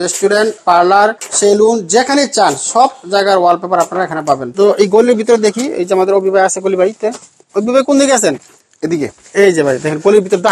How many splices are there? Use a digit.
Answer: 2